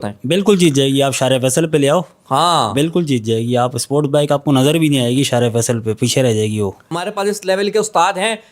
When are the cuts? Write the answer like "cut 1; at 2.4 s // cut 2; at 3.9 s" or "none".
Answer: cut 1; at 6.9 s